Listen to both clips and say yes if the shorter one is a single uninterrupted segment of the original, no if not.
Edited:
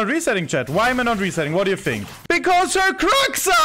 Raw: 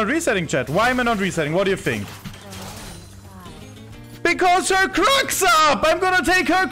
no